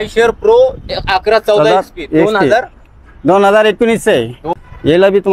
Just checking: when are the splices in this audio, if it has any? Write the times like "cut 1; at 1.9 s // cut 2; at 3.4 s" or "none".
cut 1; at 4.4 s